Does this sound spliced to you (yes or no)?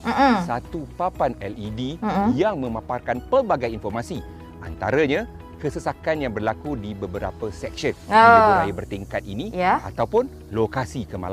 no